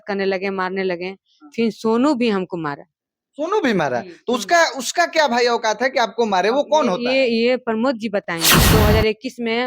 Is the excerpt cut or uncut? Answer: cut